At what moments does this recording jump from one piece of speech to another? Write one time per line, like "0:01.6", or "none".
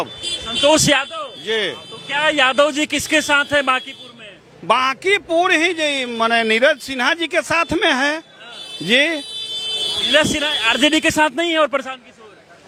none